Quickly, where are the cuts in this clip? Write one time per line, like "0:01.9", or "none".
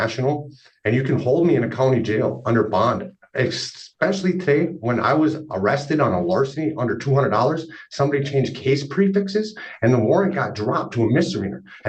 none